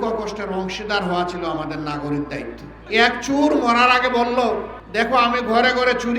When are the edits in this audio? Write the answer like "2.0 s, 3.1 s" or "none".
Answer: 2.8 s, 4.8 s